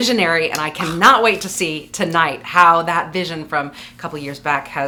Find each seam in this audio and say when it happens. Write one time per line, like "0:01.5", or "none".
none